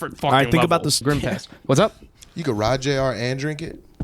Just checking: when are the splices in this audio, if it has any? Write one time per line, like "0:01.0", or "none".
0:01.0

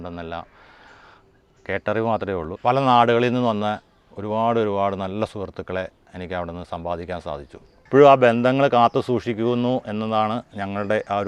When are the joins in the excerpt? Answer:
0:02.5
0:07.8

